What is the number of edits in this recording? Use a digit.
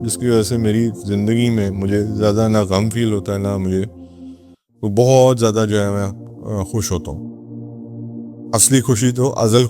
2